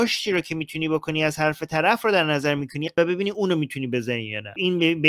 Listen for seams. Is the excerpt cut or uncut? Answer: uncut